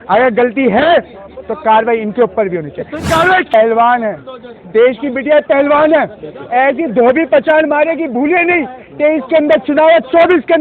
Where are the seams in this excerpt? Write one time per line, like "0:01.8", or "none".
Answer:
0:03.5